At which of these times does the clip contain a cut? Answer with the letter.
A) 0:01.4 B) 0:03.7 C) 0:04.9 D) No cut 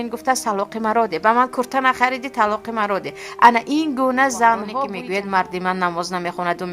C